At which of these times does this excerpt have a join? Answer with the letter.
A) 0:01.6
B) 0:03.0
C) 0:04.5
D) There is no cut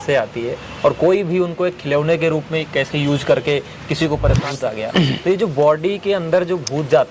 C